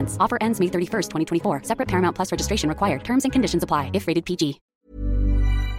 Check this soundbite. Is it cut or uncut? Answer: cut